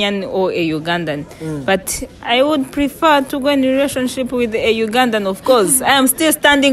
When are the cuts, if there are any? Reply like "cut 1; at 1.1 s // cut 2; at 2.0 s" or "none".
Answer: none